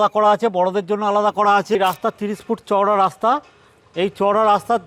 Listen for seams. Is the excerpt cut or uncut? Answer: cut